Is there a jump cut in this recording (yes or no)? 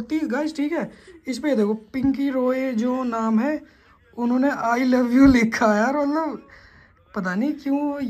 no